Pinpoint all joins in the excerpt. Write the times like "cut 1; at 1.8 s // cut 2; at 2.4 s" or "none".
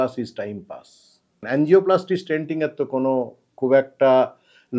cut 1; at 1.4 s